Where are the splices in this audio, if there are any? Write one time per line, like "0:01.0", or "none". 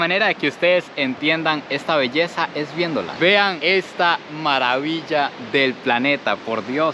none